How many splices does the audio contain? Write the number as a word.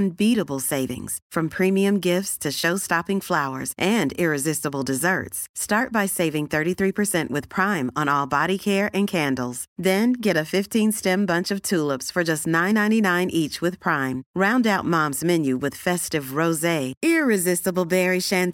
zero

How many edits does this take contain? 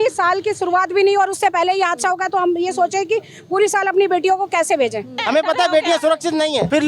one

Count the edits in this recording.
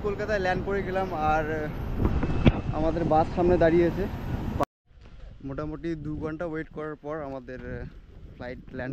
one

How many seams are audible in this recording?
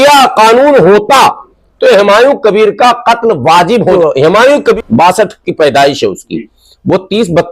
two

